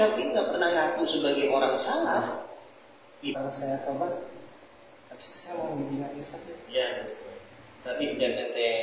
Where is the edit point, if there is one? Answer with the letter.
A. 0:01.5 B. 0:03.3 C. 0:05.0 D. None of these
B